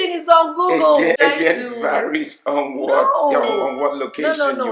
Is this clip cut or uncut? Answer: cut